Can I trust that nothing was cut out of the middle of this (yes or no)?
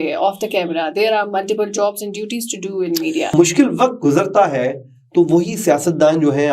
no